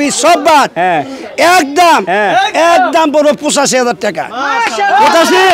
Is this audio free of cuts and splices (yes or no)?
yes